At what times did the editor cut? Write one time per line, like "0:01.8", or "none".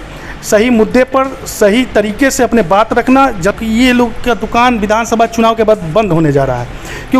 0:03.6